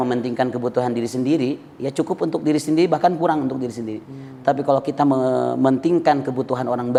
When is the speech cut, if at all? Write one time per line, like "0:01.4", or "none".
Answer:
none